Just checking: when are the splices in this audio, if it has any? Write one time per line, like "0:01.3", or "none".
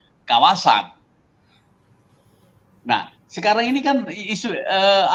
none